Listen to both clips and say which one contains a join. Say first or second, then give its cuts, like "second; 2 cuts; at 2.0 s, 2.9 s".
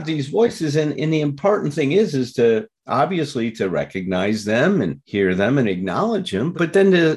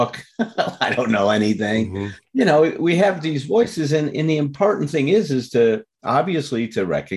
first; 1 cut; at 5.0 s